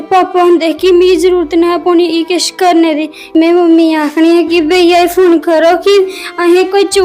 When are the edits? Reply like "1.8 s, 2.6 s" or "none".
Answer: 3.4 s